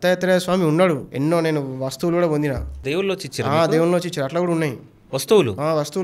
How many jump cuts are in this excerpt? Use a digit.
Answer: 2